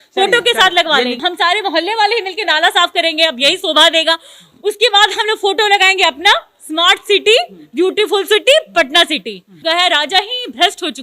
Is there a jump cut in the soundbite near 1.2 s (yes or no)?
yes